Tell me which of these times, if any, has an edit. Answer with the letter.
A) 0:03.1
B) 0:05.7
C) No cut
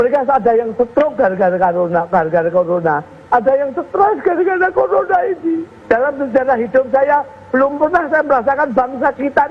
B